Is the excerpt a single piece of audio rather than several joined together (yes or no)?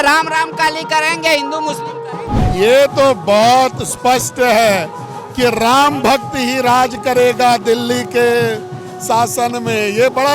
no